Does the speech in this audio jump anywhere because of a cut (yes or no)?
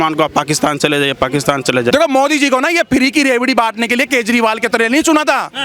yes